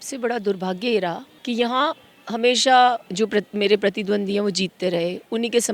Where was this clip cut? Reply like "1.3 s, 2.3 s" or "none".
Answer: 1.3 s, 3.1 s